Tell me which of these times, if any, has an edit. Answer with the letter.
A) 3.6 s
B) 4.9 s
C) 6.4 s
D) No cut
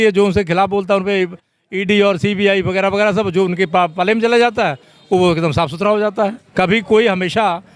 C